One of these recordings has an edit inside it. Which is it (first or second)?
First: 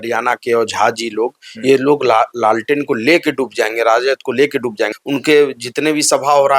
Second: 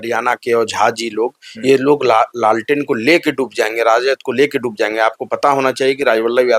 first